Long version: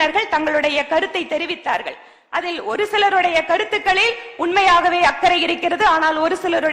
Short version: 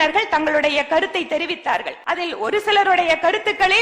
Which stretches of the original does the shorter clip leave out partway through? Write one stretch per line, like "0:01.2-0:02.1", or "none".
0:01.9-0:02.2